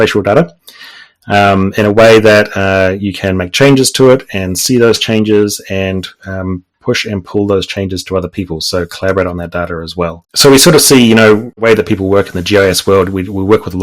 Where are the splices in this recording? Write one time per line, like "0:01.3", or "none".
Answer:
0:10.2
0:11.6